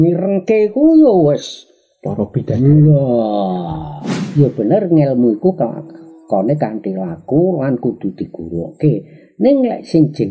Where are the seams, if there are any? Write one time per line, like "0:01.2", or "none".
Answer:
0:04.2